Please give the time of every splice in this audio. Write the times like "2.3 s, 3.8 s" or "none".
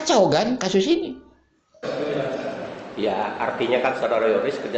1.8 s